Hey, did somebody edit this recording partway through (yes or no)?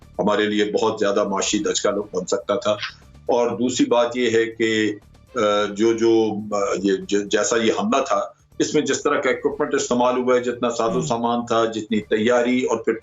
no